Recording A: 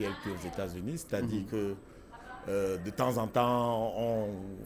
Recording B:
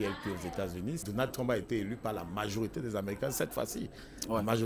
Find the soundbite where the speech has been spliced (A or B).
B